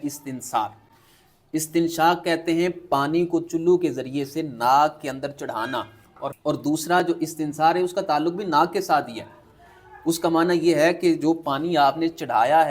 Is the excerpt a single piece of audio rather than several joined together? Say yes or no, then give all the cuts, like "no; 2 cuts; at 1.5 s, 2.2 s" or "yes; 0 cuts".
no; 1 cut; at 6.3 s